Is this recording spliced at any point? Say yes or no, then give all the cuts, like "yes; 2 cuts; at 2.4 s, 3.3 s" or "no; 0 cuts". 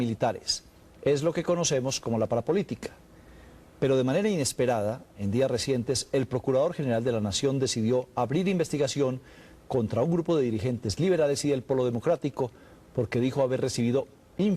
yes; 1 cut; at 6.2 s